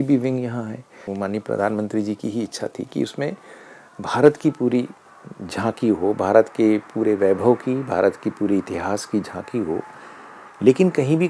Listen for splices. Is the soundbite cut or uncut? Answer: cut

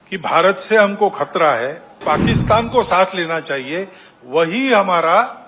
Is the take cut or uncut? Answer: cut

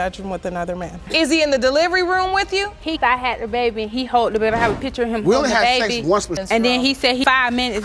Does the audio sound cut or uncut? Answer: cut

